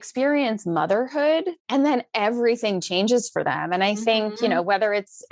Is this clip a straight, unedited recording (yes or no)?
no